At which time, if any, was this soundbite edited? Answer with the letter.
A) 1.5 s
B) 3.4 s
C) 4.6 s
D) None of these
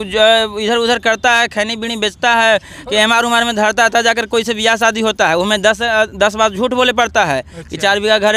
D